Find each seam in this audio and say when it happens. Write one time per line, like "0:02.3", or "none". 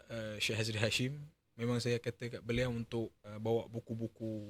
0:03.2